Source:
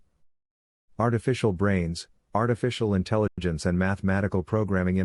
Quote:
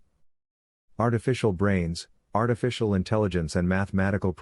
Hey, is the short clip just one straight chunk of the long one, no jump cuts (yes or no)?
no